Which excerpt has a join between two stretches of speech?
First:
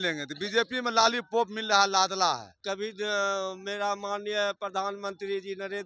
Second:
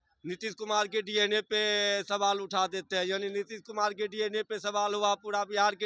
first; 1 cut; at 2.6 s

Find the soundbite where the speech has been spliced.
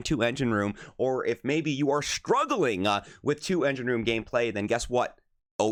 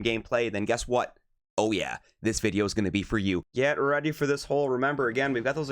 second; 1 cut; at 3.5 s

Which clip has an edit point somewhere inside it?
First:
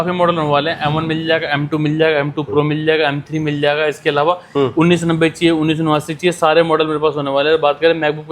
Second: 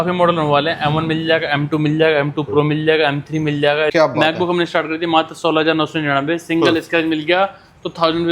second; 1 cut; at 3.9 s

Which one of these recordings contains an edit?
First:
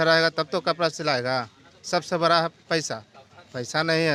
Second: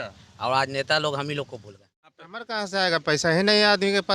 second; 1 cut; at 2.1 s

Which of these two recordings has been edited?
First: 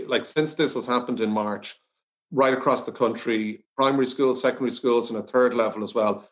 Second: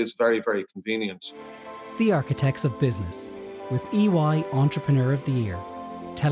second; 1 cut; at 1.8 s

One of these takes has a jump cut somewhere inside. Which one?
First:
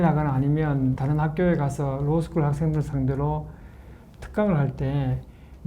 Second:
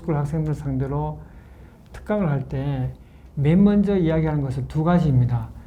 first; 1 cut; at 1.0 s

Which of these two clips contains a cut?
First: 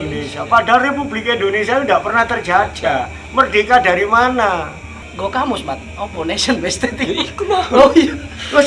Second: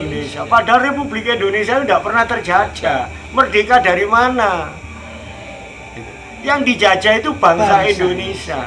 first; 1 cut; at 5.0 s

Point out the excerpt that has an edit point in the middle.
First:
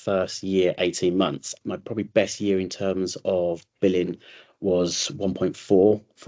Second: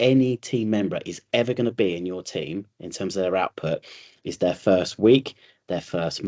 first; 1 cut; at 1.5 s

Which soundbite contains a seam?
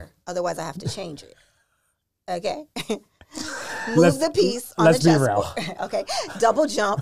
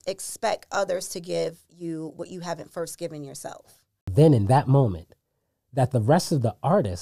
second; 1 cut; at 4.1 s

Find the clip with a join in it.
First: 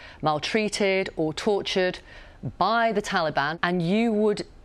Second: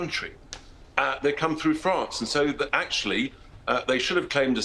first; 1 cut; at 3.5 s

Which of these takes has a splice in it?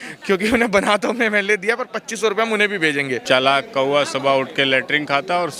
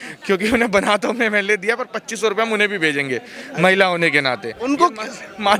first; 1 cut; at 3.2 s

